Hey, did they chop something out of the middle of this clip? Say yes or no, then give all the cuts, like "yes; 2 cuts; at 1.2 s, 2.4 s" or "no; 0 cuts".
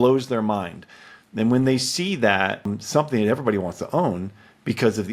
yes; 1 cut; at 2.7 s